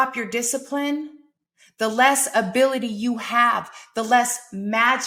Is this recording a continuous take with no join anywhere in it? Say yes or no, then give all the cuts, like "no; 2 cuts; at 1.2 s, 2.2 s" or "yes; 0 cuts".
yes; 0 cuts